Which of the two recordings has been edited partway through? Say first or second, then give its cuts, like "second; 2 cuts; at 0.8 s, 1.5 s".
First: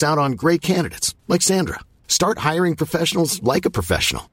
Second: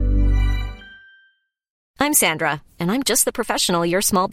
second; 1 cut; at 1.7 s